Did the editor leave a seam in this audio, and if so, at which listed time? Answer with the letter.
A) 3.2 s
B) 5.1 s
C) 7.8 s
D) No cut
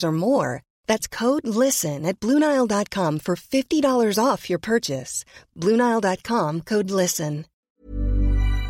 C